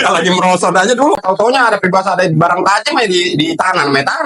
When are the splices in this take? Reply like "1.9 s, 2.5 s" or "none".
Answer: 1.2 s